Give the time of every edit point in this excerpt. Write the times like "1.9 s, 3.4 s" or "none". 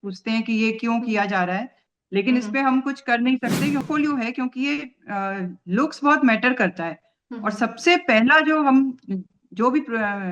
3.8 s